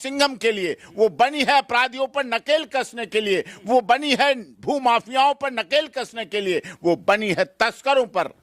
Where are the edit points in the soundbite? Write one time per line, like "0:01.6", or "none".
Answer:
none